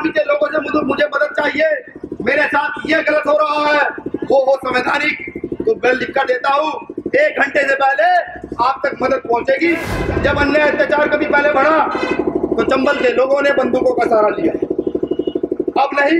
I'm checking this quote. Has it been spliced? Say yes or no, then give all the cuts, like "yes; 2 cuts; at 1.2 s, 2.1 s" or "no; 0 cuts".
yes; 1 cut; at 9.9 s